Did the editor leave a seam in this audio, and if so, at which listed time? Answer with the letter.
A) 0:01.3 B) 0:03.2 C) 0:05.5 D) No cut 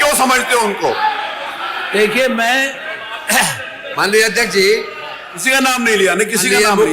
D